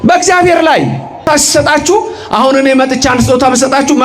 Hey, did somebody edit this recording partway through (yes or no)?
yes